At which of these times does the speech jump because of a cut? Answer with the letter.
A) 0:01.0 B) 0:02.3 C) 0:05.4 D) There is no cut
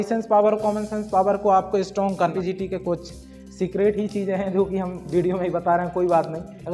B